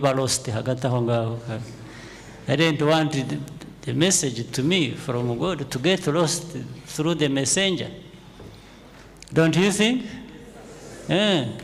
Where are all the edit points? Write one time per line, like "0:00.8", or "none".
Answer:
none